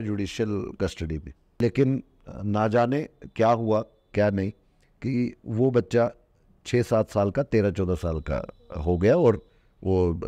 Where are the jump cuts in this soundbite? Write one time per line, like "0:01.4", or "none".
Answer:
0:01.6